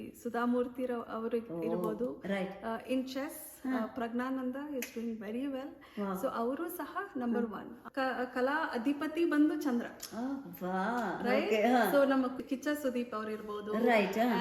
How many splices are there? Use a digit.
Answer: 2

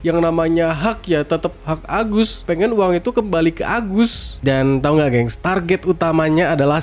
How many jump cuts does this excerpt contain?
1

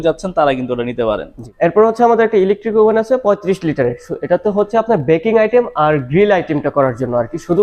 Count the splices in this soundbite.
1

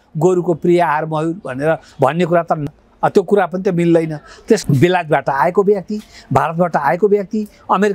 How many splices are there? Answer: 2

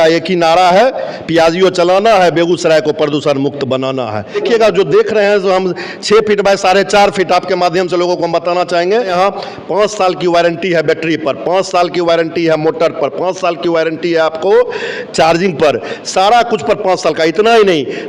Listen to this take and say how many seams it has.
2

